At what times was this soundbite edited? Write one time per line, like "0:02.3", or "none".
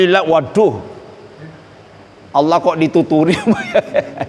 none